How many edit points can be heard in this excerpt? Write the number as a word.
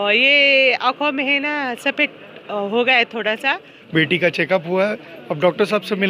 one